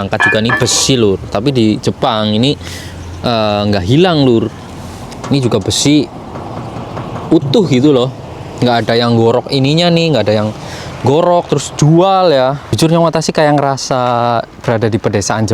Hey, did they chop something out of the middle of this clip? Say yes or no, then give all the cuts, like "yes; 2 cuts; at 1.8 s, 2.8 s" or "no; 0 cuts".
yes; 1 cut; at 12.7 s